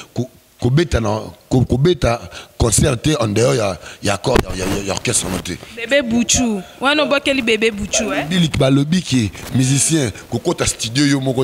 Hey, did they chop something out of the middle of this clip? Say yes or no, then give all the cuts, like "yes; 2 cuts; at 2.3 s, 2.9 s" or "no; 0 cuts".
no; 0 cuts